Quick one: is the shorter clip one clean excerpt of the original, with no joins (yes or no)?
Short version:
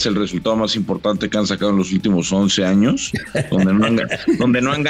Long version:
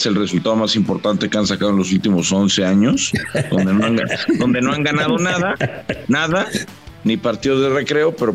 yes